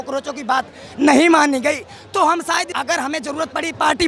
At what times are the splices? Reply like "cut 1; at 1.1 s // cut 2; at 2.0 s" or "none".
cut 1; at 2.7 s

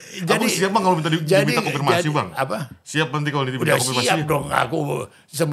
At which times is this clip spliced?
none

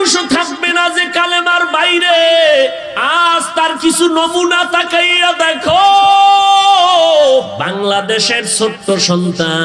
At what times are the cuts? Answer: cut 1; at 2.9 s // cut 2; at 7.5 s

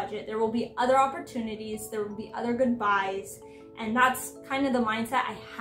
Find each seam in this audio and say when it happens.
none

